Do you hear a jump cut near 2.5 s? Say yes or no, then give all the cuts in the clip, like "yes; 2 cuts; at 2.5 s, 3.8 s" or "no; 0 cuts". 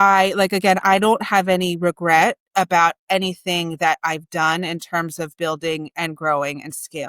no; 0 cuts